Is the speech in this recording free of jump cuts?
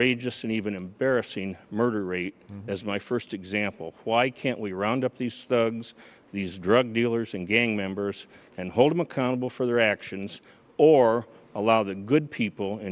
yes; 0 cuts

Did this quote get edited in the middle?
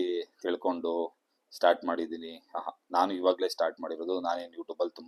no; 0 cuts

